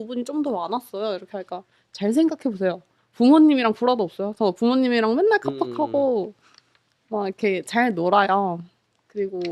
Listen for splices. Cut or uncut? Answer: uncut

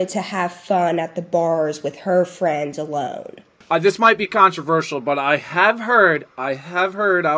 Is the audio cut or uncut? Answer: cut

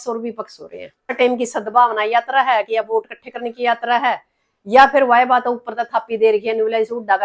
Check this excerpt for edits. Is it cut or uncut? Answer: cut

